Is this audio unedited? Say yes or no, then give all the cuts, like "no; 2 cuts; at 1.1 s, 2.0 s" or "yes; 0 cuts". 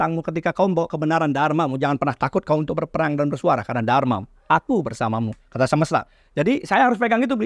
yes; 0 cuts